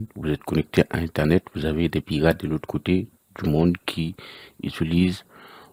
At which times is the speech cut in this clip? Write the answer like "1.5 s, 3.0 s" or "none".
none